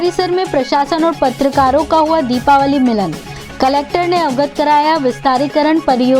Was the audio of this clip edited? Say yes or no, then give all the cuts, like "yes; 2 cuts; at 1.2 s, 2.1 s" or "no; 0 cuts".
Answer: no; 0 cuts